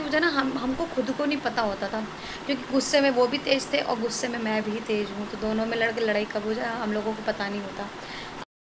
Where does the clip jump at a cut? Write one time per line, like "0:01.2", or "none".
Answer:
none